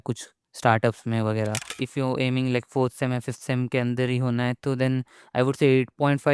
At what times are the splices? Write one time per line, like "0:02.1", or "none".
0:01.8